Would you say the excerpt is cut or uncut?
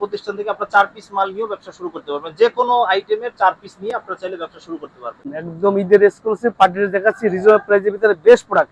cut